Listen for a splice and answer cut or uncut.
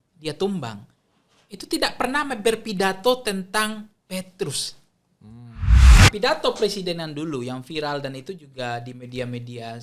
cut